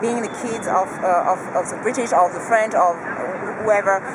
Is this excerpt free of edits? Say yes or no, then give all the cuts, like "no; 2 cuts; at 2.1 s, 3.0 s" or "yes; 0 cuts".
yes; 0 cuts